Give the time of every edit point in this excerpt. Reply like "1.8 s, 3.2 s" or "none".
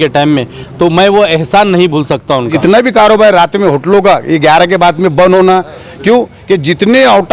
2.5 s